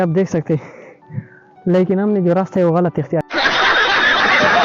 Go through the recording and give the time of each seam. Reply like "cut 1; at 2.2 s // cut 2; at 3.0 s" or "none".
cut 1; at 3.3 s